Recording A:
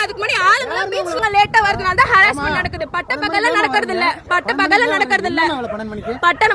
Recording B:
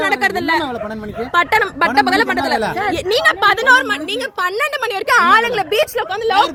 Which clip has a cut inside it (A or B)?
A